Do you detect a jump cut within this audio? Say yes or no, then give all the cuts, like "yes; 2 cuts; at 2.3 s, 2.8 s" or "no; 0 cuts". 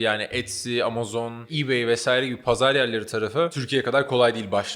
yes; 2 cuts; at 1.5 s, 3.6 s